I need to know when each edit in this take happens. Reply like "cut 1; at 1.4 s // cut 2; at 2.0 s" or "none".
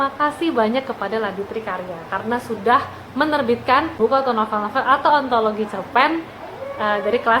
none